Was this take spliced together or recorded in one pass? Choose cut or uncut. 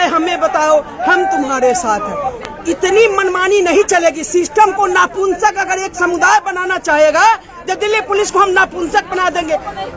uncut